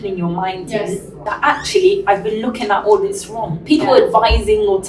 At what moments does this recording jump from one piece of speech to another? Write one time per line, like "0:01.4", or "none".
0:01.3
0:03.5

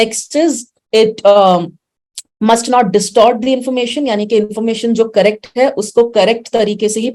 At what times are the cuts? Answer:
none

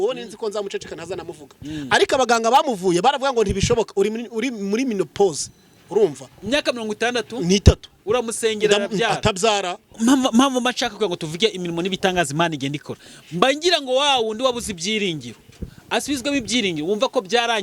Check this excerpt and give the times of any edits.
0:10.0

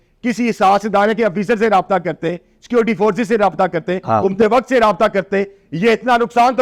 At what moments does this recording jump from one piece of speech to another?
none

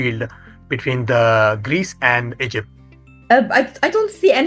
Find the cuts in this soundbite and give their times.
none

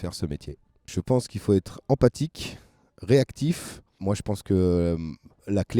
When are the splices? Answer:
0:00.9
0:04.0

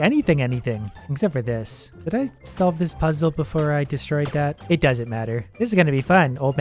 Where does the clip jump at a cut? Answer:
none

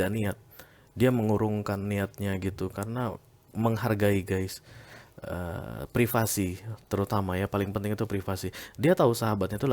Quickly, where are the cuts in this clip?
none

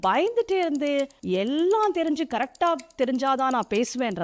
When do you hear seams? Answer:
0:01.2

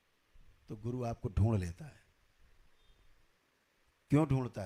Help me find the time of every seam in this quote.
none

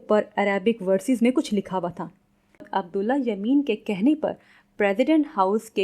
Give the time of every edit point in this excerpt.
0:02.7

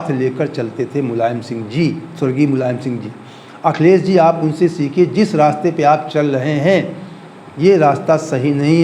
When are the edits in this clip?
none

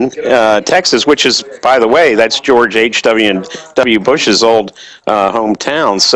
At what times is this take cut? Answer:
0:01.4

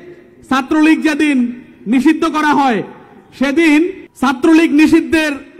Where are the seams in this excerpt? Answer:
0:04.0

